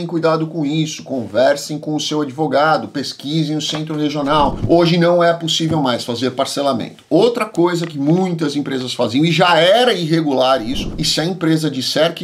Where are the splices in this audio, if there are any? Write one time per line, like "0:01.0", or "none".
0:04.6
0:10.9